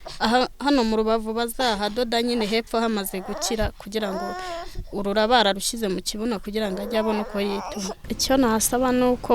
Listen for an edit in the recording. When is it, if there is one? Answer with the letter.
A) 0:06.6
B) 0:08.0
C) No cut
B